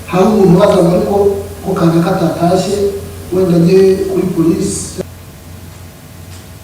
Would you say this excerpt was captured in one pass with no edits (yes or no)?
no